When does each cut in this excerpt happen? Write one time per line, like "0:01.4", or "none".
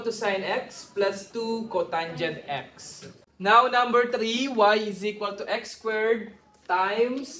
0:03.3